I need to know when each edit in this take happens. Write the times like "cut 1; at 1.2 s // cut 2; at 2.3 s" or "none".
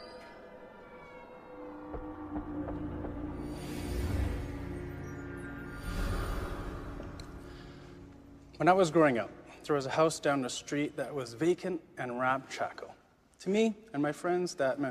cut 1; at 1.5 s